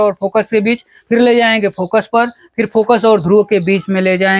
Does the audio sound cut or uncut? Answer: uncut